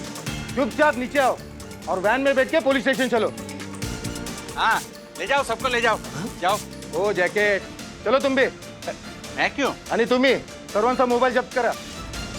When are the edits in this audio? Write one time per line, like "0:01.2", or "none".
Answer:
none